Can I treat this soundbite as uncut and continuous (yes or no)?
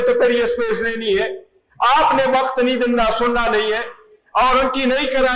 yes